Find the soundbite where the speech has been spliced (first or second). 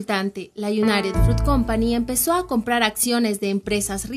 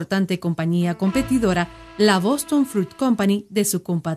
first